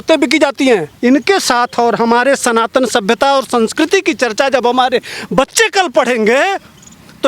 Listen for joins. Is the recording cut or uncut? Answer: cut